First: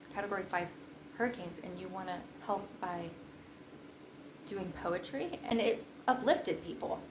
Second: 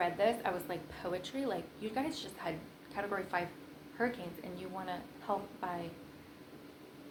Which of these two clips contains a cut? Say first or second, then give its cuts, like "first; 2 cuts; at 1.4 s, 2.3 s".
first; 1 cut; at 5.4 s